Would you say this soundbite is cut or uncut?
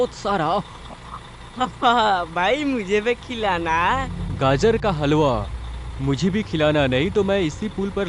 uncut